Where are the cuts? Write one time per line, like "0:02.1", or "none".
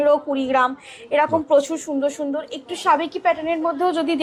none